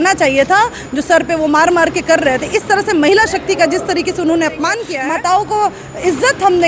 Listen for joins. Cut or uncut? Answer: cut